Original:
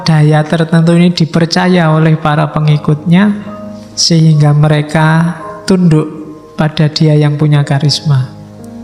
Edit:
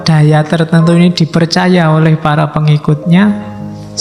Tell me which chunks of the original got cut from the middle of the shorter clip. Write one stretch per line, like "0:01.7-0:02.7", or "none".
none